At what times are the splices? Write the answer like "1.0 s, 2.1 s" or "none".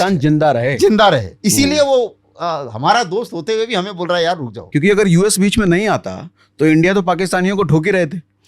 1.3 s, 4.5 s